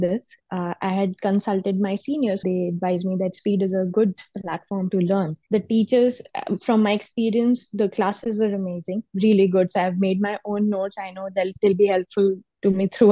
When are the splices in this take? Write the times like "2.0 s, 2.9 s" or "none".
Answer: 2.4 s, 5.4 s